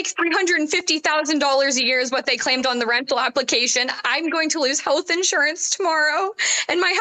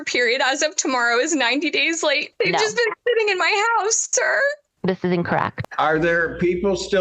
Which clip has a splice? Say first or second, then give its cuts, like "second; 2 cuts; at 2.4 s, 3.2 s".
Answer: second; 2 cuts; at 2.3 s, 5.5 s